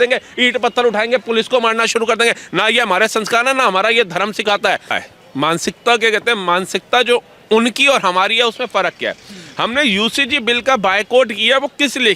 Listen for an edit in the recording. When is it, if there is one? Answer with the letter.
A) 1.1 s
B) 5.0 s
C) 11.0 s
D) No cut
B